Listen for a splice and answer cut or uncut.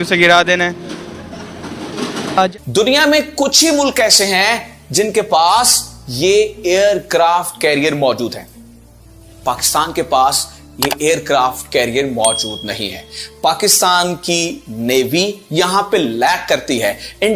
cut